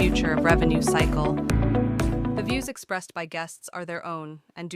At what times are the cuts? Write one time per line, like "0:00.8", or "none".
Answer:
0:02.4